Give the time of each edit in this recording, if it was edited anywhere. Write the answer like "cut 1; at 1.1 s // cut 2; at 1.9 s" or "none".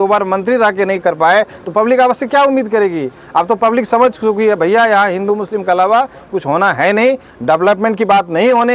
none

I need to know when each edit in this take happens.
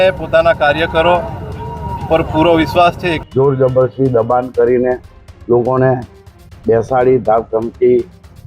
cut 1; at 3.1 s

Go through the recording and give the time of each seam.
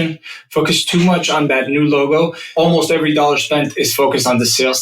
cut 1; at 1.5 s // cut 2; at 2.5 s

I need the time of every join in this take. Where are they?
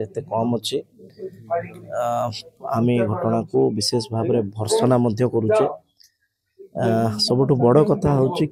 none

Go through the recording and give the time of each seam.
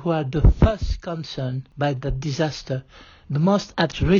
cut 1; at 1.6 s

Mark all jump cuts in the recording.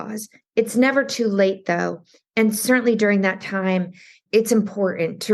cut 1; at 4.1 s

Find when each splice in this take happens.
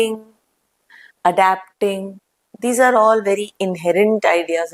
none

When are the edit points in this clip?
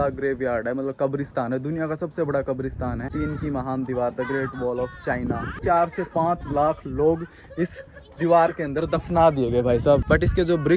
cut 1; at 3.1 s // cut 2; at 5.6 s // cut 3; at 10.0 s

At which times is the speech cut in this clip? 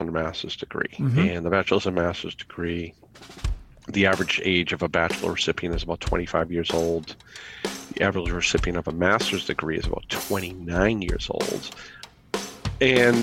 cut 1; at 12.1 s

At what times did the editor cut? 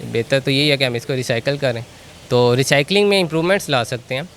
none

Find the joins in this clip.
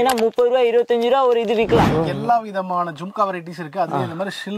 cut 1; at 1.9 s

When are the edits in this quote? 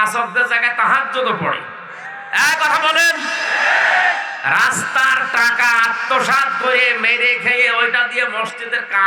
none

